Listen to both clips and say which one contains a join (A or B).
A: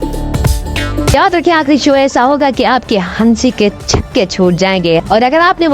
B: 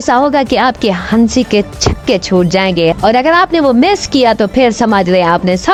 A